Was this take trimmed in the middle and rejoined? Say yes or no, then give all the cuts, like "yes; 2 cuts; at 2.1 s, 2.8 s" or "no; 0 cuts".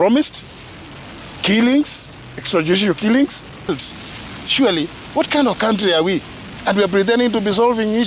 yes; 1 cut; at 3.7 s